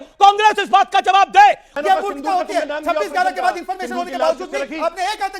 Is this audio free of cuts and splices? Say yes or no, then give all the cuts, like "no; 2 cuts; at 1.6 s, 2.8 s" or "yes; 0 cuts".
no; 1 cut; at 1.7 s